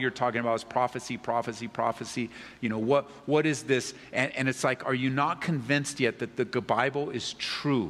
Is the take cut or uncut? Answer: uncut